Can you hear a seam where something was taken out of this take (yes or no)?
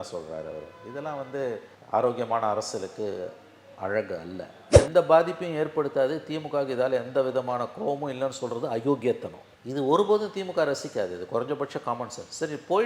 yes